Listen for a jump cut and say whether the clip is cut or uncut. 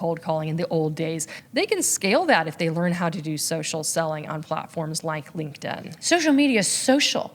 cut